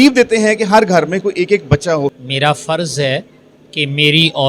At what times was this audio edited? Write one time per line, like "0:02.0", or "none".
0:02.2